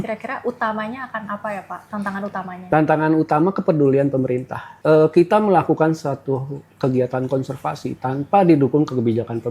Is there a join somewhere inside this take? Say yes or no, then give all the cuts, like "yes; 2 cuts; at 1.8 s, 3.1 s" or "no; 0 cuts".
yes; 1 cut; at 1.8 s